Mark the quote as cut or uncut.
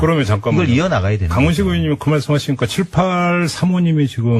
uncut